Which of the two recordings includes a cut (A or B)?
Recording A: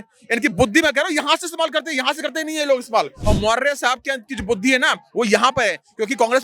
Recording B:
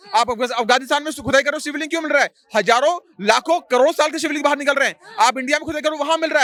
A